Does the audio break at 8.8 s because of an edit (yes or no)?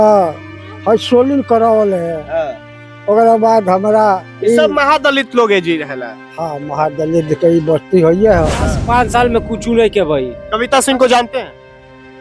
yes